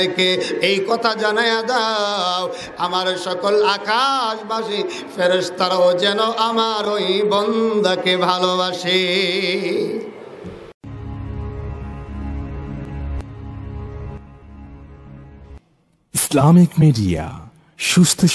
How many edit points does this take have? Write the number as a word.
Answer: one